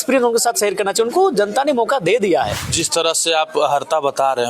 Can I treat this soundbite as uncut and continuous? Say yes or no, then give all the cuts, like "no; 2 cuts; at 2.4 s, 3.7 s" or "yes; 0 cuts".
no; 1 cut; at 2.6 s